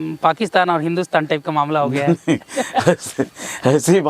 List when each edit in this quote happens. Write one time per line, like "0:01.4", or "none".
none